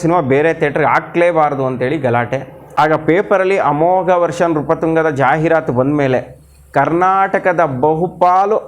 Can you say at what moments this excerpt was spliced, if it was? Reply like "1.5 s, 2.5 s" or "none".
2.6 s